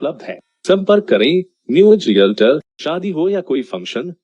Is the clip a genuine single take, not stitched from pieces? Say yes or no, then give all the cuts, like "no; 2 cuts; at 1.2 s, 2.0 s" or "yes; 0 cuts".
no; 1 cut; at 2.8 s